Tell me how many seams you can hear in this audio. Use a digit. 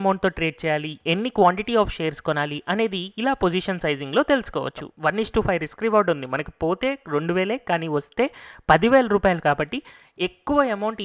1